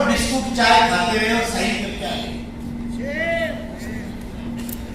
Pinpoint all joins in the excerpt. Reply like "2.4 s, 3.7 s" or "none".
none